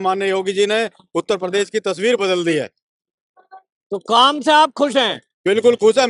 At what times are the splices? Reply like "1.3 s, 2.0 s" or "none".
none